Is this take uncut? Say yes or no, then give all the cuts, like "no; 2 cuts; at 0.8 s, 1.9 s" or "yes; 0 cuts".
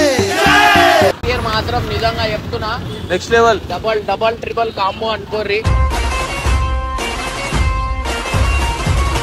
no; 1 cut; at 1.1 s